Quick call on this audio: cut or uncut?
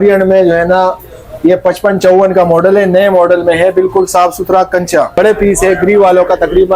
cut